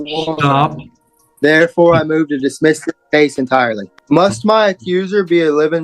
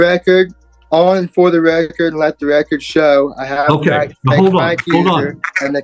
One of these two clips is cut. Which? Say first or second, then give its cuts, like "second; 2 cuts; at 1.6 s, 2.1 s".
first; 1 cut; at 3.9 s